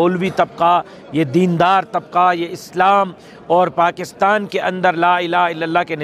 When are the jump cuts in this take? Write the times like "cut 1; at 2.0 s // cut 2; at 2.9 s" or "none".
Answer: none